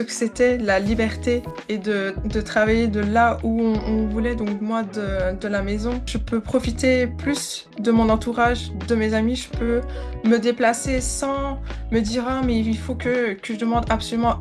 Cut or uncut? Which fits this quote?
uncut